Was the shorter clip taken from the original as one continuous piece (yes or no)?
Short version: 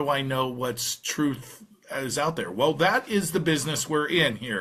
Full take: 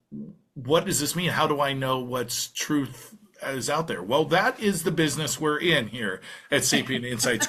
yes